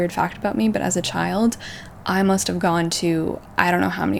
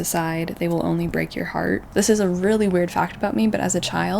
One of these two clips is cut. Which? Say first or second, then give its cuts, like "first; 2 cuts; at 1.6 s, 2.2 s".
second; 1 cut; at 1.9 s